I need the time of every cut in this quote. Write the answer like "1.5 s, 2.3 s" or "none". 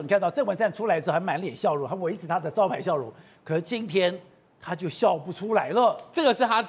none